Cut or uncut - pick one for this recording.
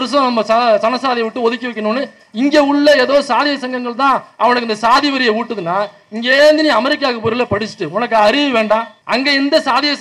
cut